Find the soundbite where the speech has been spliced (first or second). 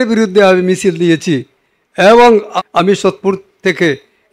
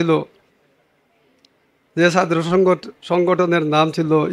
first